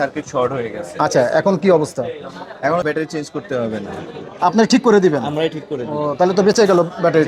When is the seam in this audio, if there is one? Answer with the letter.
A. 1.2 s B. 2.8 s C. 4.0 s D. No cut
B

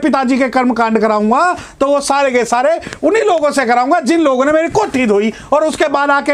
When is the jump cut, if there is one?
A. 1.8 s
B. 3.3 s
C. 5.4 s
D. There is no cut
D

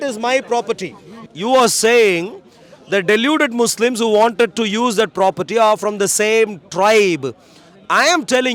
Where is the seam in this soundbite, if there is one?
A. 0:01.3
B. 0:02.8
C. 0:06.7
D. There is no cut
A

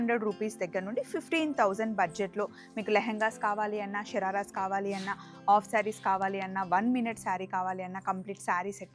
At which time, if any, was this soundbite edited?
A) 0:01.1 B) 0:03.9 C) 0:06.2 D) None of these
D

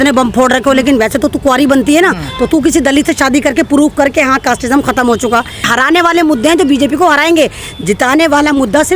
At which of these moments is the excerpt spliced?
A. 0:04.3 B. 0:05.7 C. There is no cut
B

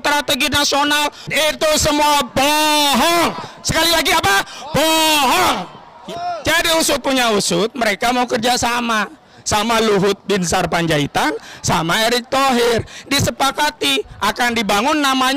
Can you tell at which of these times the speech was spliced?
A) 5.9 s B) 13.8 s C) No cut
A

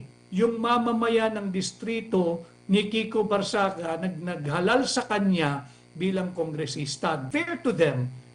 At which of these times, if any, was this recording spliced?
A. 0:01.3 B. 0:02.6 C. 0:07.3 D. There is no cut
C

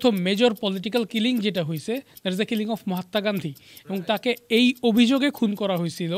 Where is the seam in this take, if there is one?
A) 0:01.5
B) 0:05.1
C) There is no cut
C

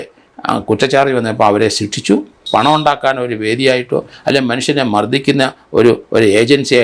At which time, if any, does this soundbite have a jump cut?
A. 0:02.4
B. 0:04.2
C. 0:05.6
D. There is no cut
A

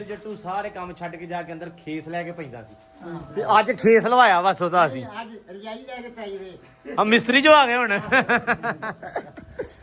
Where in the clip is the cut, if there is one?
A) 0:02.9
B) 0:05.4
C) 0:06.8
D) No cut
D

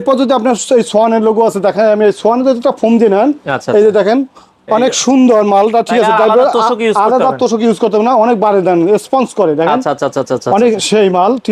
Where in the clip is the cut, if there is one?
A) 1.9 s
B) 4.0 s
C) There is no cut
C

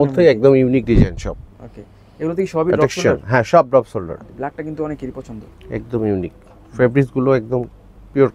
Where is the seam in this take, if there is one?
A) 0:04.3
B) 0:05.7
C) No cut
A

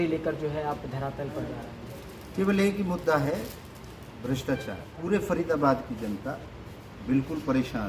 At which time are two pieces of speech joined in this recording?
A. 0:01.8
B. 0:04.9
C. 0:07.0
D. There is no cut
B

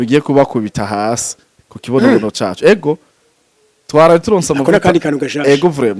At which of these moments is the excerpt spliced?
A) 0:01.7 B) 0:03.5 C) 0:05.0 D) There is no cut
D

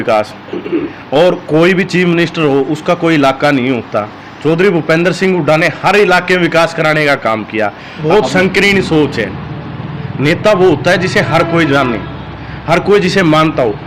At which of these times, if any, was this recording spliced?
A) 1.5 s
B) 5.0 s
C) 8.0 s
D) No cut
C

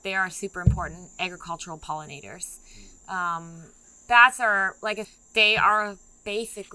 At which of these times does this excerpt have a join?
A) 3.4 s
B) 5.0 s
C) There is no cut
B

